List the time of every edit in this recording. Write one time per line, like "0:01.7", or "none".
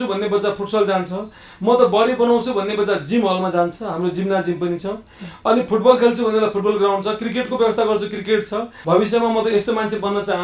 0:08.8